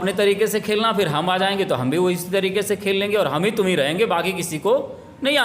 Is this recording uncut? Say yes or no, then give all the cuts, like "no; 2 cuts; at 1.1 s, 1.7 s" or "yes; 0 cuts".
yes; 0 cuts